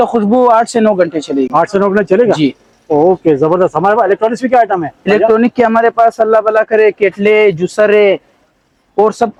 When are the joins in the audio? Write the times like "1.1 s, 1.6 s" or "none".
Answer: none

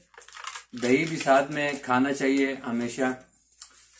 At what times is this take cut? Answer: none

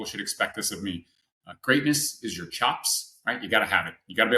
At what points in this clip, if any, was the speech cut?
none

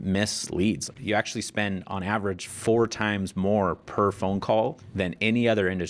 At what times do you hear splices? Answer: 0.9 s, 2.5 s, 4.8 s

